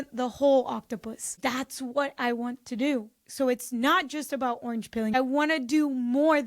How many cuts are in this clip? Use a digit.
2